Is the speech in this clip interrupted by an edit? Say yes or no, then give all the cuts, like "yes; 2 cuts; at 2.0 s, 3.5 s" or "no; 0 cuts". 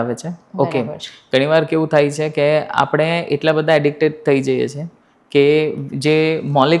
no; 0 cuts